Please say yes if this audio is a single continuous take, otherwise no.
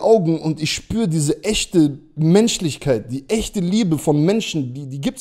yes